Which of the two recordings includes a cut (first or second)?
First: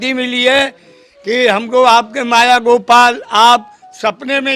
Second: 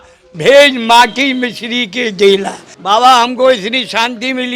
second